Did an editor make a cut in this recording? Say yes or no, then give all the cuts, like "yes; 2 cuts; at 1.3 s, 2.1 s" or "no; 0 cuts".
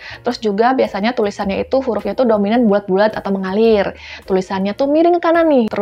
no; 0 cuts